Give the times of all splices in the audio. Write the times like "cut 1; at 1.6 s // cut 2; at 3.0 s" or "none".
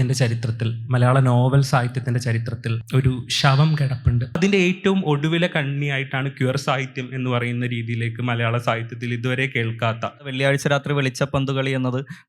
cut 1; at 4.4 s // cut 2; at 10.3 s